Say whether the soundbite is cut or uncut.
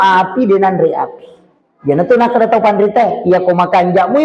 uncut